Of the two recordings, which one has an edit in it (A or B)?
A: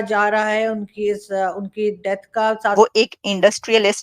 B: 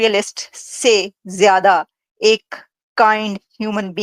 A